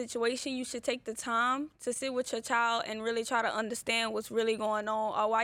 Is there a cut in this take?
no; 0 cuts

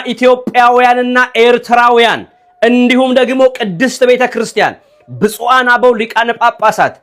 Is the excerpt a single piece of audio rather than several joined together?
yes; 0 cuts

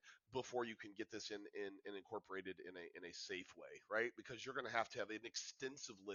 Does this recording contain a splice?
no; 0 cuts

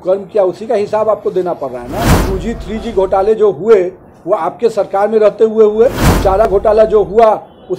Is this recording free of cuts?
no; 2 cuts; at 2.2 s, 6.5 s

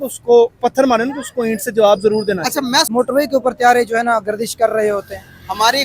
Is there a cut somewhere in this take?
yes; 1 cut; at 2.9 s

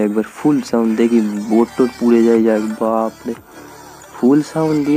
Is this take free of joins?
yes; 0 cuts

